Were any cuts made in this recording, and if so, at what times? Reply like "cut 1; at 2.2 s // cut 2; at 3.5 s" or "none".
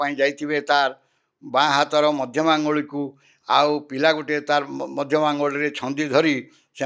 none